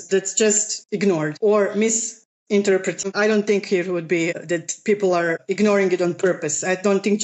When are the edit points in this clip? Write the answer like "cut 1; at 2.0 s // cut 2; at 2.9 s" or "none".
cut 1; at 3.0 s

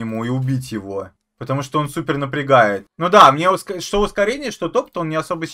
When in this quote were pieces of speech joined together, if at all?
none

